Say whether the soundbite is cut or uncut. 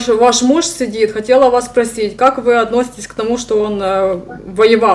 uncut